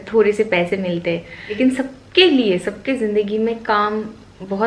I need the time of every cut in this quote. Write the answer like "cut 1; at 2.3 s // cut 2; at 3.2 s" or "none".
cut 1; at 1.6 s

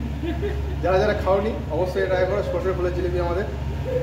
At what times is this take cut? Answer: none

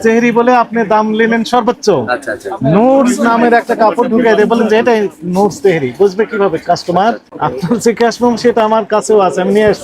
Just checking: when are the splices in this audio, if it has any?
cut 1; at 7.3 s

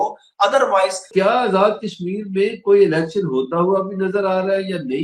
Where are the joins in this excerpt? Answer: cut 1; at 1.1 s

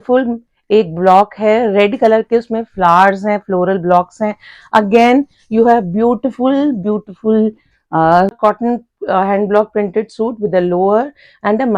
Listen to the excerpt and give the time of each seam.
cut 1; at 8.4 s

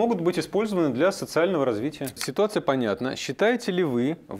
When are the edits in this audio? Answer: cut 1; at 2.1 s

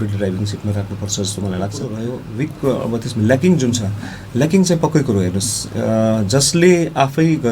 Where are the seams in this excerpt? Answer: cut 1; at 2.0 s

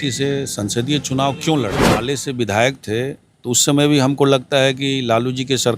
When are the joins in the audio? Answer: cut 1; at 1.9 s

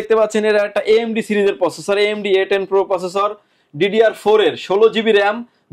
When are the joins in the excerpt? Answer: none

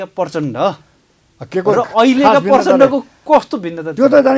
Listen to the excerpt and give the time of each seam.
none

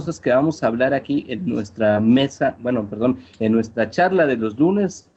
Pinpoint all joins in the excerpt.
none

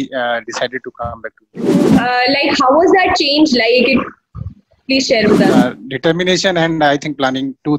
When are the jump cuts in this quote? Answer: cut 1; at 1.9 s // cut 2; at 5.5 s

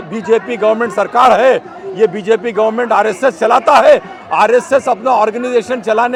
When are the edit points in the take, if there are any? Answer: none

